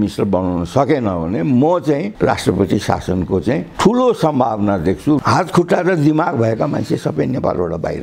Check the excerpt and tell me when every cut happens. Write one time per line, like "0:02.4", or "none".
0:05.2